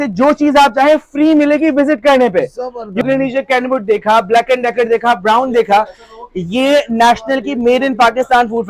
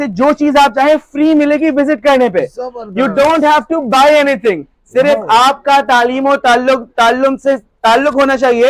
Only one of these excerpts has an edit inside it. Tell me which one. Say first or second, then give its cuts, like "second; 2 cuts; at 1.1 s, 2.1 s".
first; 1 cut; at 3.0 s